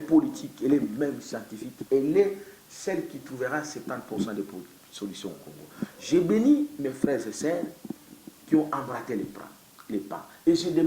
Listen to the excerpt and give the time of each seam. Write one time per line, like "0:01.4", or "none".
none